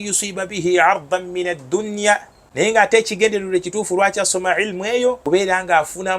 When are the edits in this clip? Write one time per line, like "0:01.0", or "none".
0:02.7
0:05.2